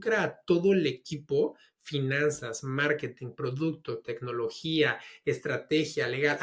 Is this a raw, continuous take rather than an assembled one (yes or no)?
yes